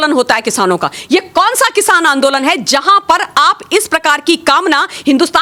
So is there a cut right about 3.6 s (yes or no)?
no